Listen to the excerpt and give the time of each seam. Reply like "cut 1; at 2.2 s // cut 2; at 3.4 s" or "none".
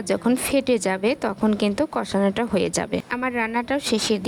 none